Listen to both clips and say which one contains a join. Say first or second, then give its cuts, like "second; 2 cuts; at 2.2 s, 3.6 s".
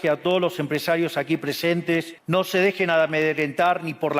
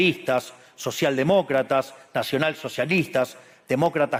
first; 1 cut; at 2.2 s